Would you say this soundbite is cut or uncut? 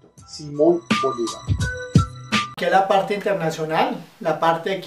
uncut